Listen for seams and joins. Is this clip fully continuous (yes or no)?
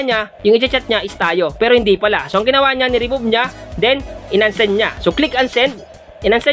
yes